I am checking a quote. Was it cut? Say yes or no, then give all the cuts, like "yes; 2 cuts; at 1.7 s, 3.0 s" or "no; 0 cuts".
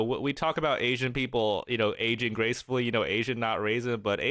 no; 0 cuts